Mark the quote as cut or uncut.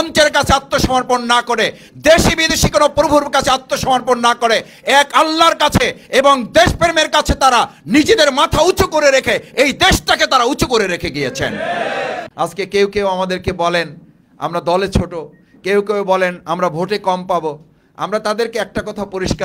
cut